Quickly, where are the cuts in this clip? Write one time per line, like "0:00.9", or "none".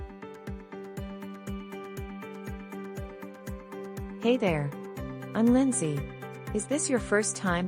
none